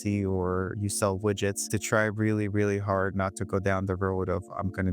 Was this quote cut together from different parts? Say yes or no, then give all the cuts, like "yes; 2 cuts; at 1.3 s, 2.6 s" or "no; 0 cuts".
yes; 1 cut; at 1.8 s